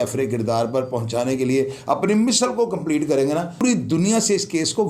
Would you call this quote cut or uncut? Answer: cut